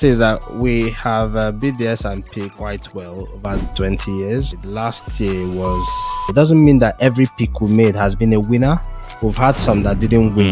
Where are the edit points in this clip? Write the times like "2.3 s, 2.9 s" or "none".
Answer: 4.6 s, 6.3 s